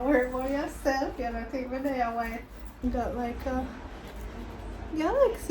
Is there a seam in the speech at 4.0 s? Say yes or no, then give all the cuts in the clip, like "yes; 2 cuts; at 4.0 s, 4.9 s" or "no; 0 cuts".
no; 1 cut; at 2.8 s